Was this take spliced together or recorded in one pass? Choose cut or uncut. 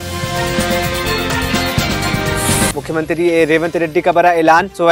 cut